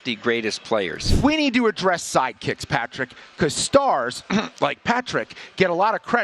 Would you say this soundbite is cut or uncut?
cut